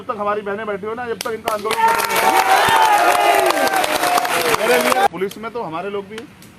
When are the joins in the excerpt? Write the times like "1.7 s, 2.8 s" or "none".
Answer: 5.1 s